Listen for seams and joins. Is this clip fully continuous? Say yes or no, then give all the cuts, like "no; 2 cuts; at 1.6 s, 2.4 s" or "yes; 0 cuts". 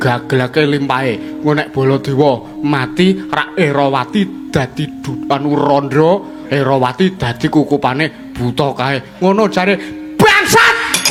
yes; 0 cuts